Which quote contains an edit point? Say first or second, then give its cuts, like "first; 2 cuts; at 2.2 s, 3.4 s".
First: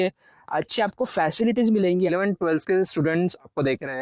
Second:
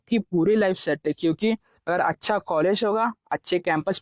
first; 1 cut; at 2.1 s